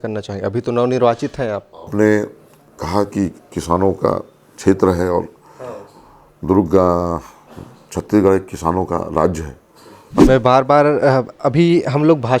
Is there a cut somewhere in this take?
yes; 1 cut; at 10.2 s

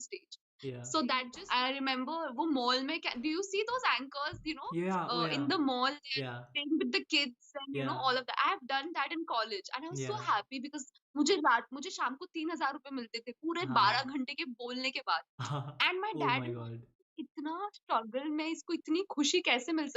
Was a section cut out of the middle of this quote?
yes; 1 cut; at 1.4 s

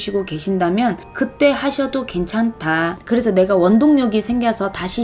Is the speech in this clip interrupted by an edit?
yes; 1 cut; at 3.0 s

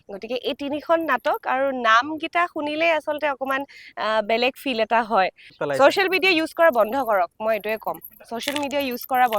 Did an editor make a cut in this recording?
yes; 1 cut; at 5.6 s

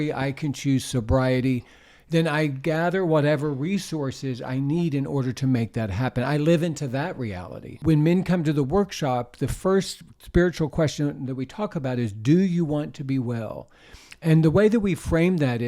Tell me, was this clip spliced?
yes; 1 cut; at 7.8 s

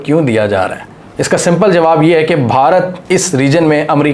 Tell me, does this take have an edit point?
no; 0 cuts

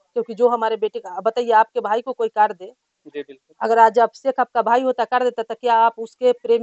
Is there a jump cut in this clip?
no; 0 cuts

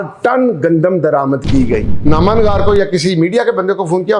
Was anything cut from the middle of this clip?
yes; 1 cut; at 1.9 s

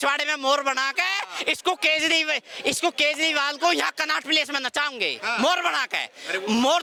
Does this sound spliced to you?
no; 0 cuts

